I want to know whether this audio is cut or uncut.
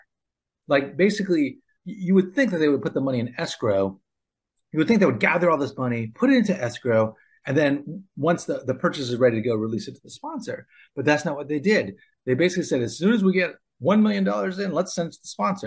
uncut